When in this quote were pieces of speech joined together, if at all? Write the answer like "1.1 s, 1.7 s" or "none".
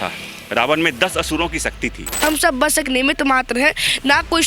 2.2 s

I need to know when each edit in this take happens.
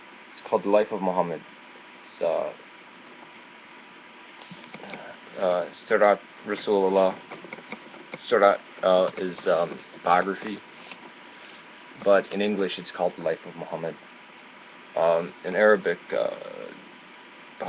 none

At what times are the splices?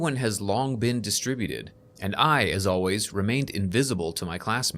1.9 s

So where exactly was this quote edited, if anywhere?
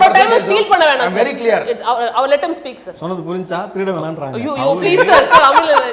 none

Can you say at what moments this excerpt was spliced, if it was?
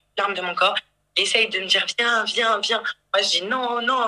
none

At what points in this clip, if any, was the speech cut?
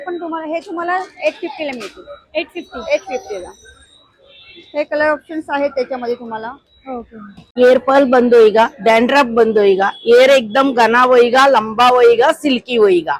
7.4 s

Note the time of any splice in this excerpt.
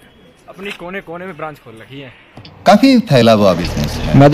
none

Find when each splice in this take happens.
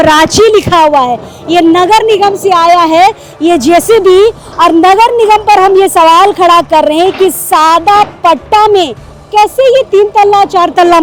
none

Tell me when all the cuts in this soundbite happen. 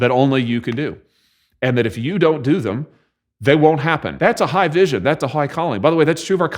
4.1 s

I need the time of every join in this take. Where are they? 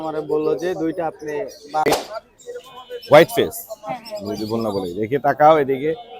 1.9 s

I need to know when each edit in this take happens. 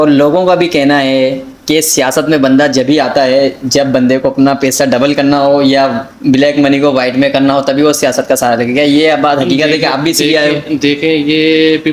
none

